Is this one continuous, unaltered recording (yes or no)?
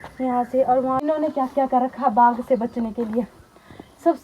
no